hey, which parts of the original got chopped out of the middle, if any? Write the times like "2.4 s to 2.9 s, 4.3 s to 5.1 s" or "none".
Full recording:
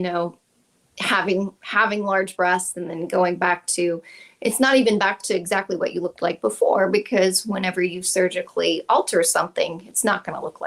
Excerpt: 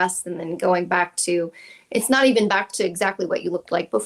none